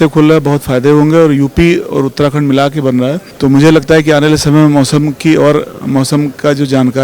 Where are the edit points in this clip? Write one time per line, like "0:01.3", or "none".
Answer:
0:03.3